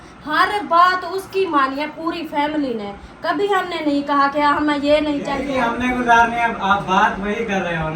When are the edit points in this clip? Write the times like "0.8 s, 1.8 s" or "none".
5.4 s

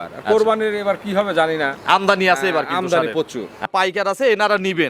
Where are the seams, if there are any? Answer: 3.7 s

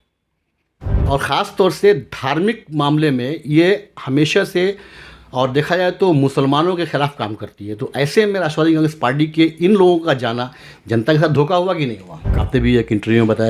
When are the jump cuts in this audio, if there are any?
1.0 s, 12.4 s

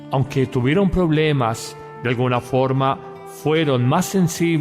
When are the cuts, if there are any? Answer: 3.5 s

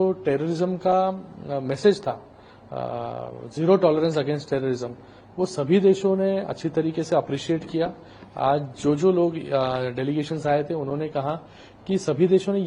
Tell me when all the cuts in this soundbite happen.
none

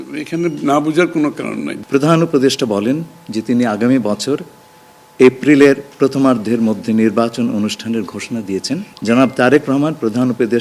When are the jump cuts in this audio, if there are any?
1.8 s, 8.9 s

